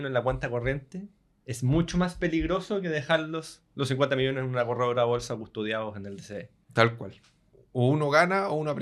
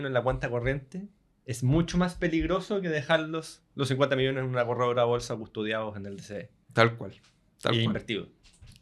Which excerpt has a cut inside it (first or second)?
first